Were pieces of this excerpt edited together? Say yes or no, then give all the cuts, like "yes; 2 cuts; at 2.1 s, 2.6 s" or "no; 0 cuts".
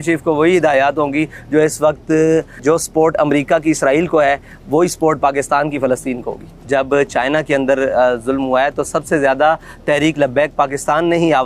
yes; 2 cuts; at 2.5 s, 6.5 s